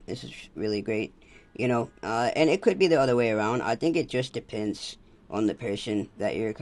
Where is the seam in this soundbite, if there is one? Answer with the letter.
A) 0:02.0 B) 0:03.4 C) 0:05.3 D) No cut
D